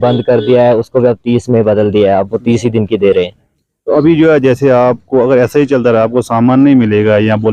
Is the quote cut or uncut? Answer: uncut